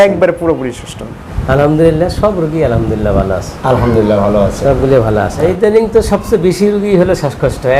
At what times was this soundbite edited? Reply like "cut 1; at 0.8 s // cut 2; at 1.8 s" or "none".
cut 1; at 1.1 s // cut 2; at 5.4 s